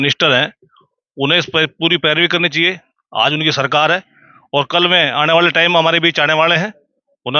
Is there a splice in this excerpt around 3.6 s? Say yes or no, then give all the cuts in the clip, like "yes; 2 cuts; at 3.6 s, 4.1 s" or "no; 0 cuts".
no; 0 cuts